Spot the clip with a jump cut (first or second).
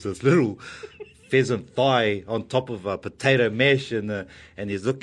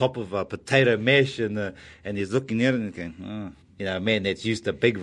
second